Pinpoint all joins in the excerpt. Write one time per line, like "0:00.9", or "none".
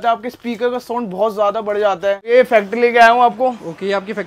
0:02.3